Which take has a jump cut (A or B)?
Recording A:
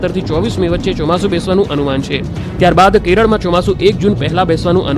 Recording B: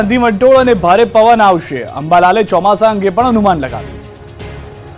A